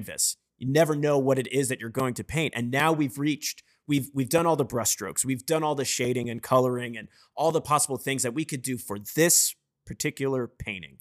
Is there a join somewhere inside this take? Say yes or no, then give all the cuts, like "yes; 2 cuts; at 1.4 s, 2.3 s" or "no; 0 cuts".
no; 0 cuts